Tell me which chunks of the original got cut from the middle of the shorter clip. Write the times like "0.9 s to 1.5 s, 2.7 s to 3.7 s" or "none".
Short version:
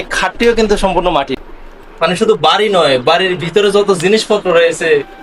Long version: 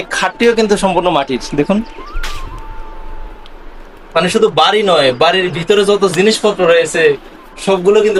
1.4 s to 3.5 s